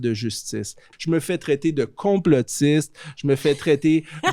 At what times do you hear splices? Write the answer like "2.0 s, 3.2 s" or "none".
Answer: 0.9 s